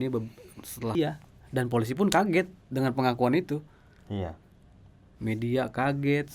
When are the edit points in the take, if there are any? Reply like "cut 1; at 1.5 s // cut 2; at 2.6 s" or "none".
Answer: cut 1; at 1.0 s